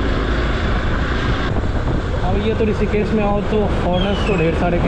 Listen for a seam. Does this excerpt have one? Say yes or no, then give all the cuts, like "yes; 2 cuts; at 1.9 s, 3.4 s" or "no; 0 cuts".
yes; 1 cut; at 1.5 s